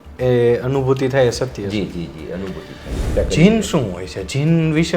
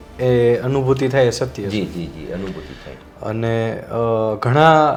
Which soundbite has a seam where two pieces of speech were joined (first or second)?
first